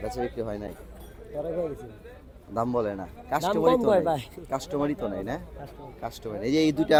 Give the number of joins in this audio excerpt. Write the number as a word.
zero